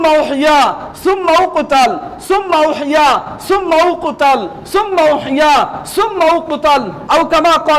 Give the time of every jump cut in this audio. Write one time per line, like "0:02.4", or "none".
none